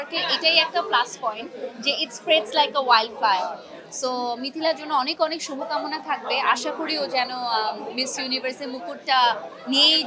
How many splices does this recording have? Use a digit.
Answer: 0